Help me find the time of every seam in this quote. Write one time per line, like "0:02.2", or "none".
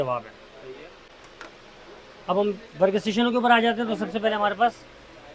none